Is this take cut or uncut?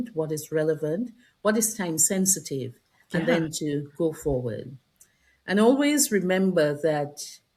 uncut